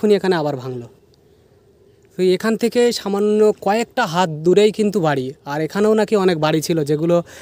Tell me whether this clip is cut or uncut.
uncut